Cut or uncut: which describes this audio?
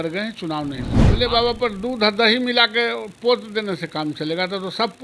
cut